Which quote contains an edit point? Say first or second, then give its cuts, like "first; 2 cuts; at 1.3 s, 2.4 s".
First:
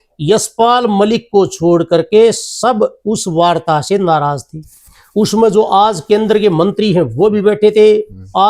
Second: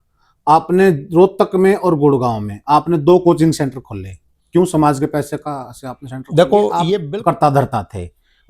second; 1 cut; at 7.0 s